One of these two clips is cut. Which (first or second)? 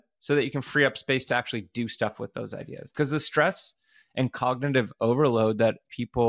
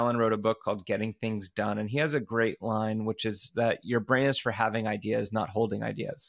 first